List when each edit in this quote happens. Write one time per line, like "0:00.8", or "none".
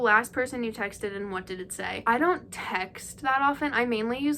none